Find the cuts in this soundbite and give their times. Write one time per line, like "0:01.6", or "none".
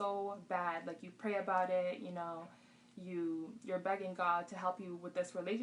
none